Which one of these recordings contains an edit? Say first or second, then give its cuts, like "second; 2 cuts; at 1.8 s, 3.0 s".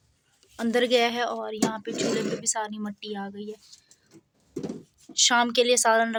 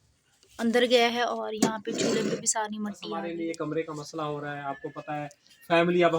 second; 1 cut; at 3.2 s